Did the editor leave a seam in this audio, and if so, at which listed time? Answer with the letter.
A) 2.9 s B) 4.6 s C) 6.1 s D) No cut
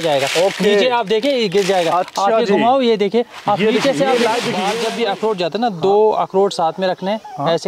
B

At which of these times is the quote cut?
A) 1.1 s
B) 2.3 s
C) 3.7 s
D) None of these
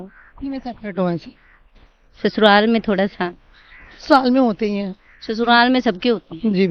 D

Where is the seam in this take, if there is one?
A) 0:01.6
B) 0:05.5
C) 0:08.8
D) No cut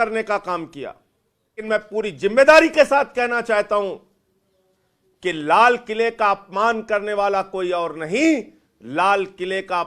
A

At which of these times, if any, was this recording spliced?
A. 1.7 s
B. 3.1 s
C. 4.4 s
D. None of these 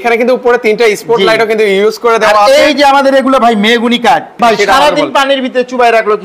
C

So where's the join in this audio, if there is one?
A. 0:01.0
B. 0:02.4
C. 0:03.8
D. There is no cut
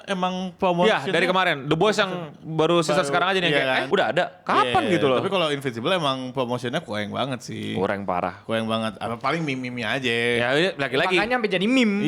C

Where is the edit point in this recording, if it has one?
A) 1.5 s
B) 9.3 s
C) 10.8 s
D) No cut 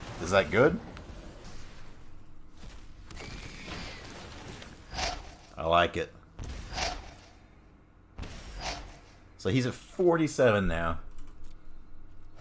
A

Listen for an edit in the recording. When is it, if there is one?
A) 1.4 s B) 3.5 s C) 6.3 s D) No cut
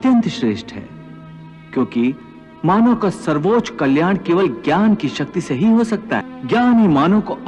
C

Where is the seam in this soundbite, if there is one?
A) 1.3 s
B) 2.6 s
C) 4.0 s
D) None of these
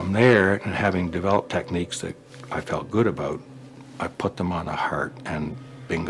D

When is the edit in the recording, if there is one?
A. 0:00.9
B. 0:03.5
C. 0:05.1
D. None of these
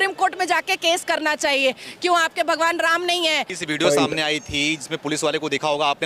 B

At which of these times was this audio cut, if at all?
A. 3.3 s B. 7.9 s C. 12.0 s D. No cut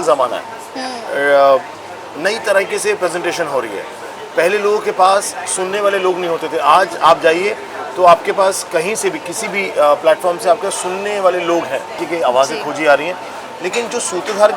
C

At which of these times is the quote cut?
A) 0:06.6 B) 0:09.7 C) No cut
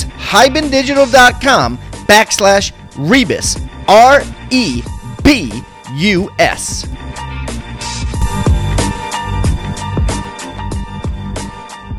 A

